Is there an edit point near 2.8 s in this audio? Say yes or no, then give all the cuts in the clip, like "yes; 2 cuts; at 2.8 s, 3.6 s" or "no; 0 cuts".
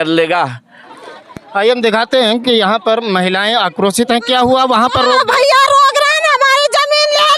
no; 1 cut; at 0.9 s